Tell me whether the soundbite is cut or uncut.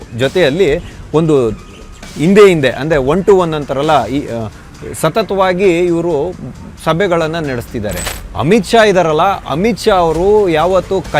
cut